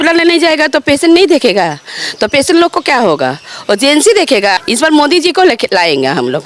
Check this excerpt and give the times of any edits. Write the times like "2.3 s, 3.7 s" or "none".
4.6 s